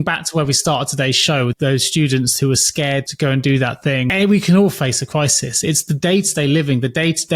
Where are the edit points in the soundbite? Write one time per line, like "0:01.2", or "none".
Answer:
0:01.5
0:03.1
0:04.1